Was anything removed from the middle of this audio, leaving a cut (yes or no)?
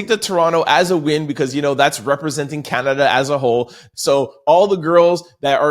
yes